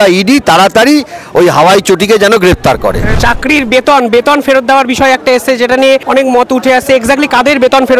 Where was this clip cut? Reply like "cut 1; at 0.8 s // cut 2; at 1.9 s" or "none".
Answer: cut 1; at 3.2 s // cut 2; at 6.0 s